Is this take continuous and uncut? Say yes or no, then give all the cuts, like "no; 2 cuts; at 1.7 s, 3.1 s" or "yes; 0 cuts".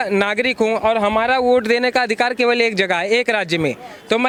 yes; 0 cuts